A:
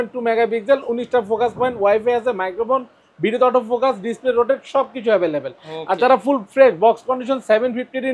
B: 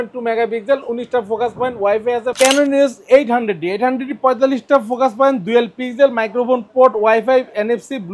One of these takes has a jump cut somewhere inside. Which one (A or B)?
B